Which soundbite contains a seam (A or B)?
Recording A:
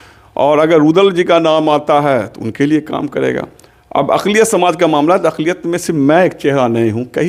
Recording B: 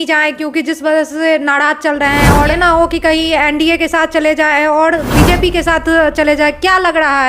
B